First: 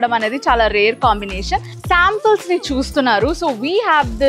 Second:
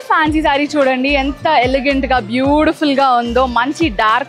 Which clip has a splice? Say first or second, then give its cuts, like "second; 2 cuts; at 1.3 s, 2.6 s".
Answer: first; 1 cut; at 1.7 s